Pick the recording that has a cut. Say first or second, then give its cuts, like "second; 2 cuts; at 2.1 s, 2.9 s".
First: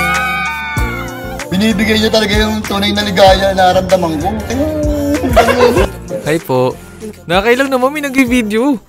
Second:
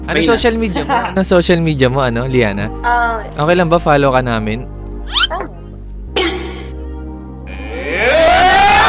first; 1 cut; at 5.9 s